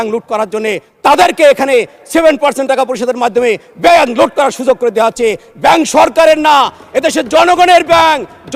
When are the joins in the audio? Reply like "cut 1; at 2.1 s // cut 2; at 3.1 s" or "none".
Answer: none